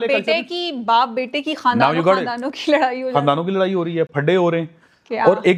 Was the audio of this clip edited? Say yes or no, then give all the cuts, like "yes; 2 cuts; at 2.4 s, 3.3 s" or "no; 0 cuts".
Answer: no; 0 cuts